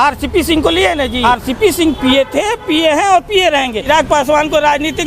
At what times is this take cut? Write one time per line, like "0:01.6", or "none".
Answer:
0:01.2
0:03.8